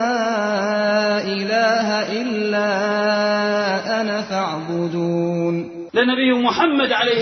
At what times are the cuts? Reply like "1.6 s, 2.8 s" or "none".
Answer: 5.9 s